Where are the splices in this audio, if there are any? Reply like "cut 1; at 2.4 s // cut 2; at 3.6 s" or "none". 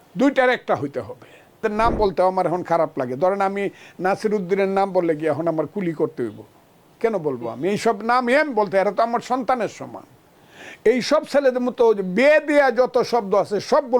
cut 1; at 1.6 s